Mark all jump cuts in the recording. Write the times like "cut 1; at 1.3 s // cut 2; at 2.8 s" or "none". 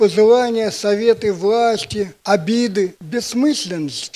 cut 1; at 2.2 s // cut 2; at 3.0 s